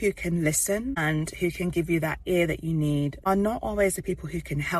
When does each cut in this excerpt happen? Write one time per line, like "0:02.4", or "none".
0:01.0
0:03.2